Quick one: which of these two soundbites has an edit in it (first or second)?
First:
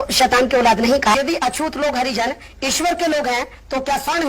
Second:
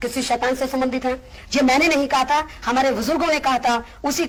first